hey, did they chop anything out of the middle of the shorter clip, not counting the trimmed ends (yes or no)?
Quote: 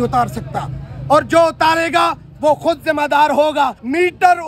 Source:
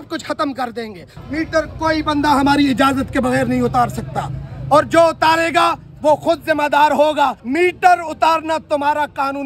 no